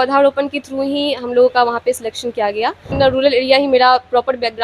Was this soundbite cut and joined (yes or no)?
yes